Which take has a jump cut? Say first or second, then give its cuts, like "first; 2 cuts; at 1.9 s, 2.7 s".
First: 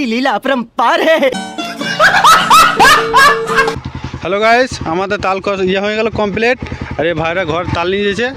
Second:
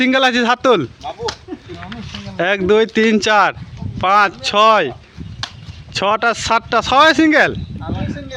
first; 2 cuts; at 1.5 s, 3.8 s